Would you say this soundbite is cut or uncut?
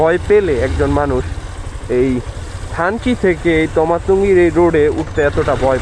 uncut